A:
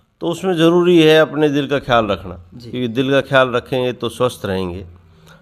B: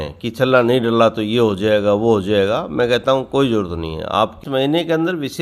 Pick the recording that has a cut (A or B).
B